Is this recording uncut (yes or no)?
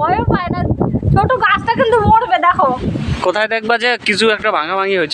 no